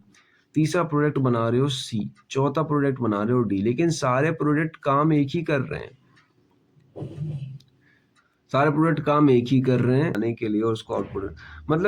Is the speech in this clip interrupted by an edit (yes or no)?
yes